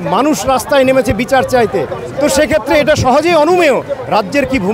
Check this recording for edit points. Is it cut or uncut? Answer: uncut